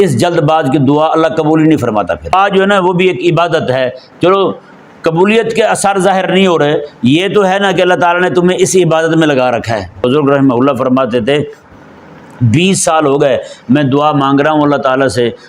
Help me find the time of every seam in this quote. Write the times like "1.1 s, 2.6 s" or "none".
2.3 s, 10.0 s